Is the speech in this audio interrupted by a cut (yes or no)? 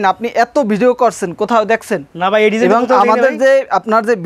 no